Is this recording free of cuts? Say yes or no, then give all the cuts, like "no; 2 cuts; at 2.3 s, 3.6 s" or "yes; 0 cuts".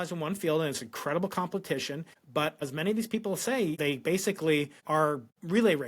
no; 3 cuts; at 2.5 s, 3.8 s, 4.9 s